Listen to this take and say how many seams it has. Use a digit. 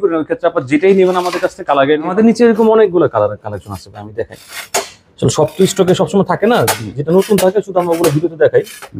1